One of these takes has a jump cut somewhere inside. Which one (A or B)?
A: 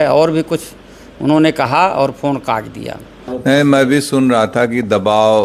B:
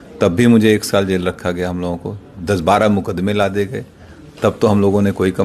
A